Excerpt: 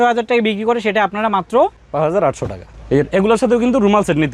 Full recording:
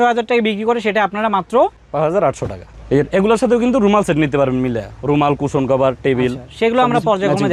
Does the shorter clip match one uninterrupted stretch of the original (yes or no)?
yes